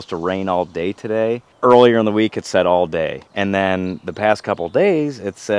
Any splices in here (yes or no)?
no